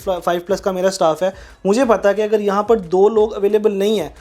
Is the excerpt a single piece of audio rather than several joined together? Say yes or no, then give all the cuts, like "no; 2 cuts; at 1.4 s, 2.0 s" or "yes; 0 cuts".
yes; 0 cuts